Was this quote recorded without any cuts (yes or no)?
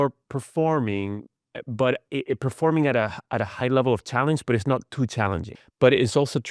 no